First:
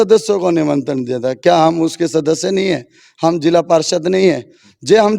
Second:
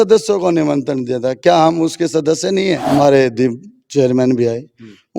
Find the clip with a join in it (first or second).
second